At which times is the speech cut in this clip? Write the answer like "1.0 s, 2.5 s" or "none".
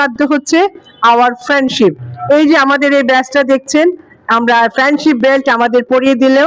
none